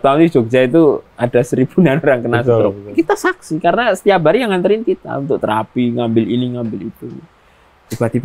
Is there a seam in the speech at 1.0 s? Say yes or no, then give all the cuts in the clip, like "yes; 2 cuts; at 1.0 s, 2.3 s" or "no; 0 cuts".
no; 1 cut; at 2.8 s